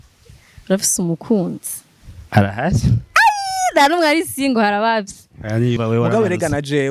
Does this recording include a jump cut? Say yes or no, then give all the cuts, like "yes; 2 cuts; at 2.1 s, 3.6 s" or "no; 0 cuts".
yes; 1 cut; at 5.8 s